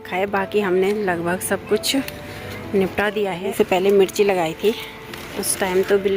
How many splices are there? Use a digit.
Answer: 1